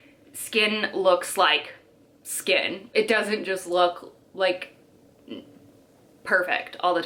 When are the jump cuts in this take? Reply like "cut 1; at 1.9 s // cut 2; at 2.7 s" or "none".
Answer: none